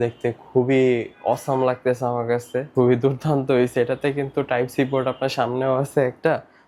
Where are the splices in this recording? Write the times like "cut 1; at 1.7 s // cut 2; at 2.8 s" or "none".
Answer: cut 1; at 2.7 s

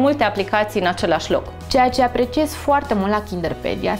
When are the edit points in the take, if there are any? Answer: cut 1; at 1.6 s

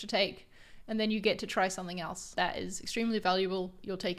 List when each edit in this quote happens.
cut 1; at 2.2 s

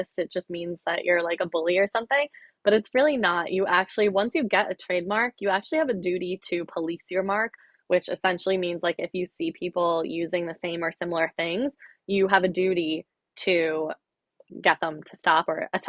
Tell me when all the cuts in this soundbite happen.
none

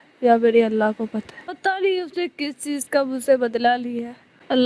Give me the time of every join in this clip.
cut 1; at 1.5 s

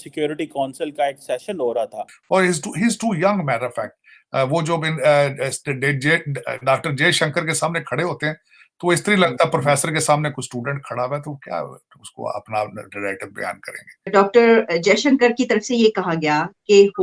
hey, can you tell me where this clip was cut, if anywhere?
cut 1; at 2.1 s // cut 2; at 14.1 s

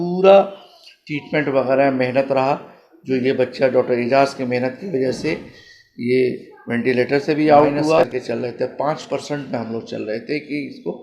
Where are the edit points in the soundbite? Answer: cut 1; at 8.1 s

